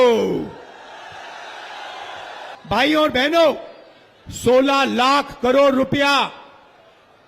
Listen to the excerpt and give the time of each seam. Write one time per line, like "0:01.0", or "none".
0:02.6